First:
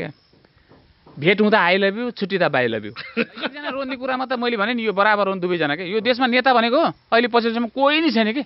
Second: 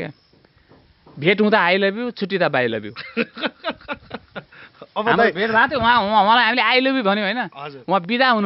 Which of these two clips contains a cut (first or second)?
first